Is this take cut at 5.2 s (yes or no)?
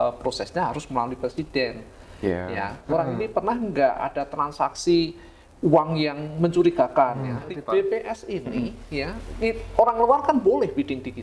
no